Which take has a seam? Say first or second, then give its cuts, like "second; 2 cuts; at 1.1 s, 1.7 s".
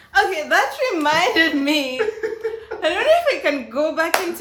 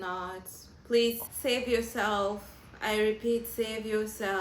second; 1 cut; at 1.2 s